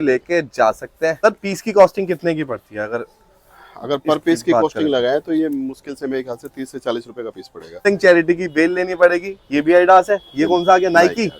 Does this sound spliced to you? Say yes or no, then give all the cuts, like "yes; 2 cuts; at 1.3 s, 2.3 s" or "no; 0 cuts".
yes; 2 cuts; at 1.2 s, 7.9 s